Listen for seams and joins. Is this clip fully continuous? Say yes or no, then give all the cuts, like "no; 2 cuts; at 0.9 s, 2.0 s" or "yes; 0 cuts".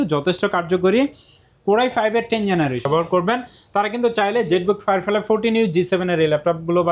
no; 1 cut; at 2.9 s